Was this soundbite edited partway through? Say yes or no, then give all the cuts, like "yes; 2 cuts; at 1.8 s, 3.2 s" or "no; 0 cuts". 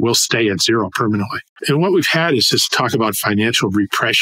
yes; 1 cut; at 1.5 s